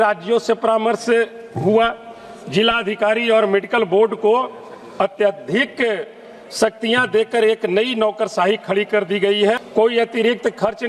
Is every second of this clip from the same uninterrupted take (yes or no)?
no